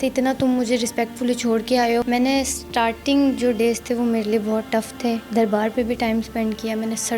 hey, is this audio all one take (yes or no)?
no